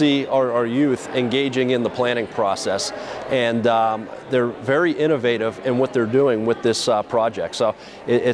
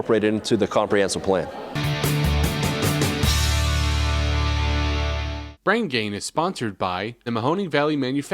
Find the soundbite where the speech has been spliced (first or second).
second